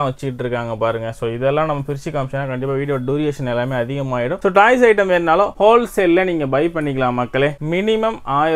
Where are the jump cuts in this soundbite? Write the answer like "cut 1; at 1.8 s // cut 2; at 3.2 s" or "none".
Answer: none